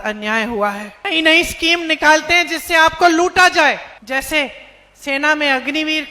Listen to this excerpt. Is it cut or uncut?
cut